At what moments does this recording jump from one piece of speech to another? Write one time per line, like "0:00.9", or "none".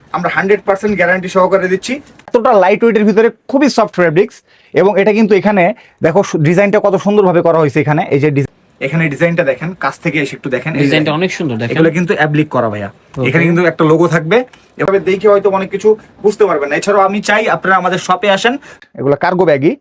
0:02.2
0:08.4
0:14.8
0:18.8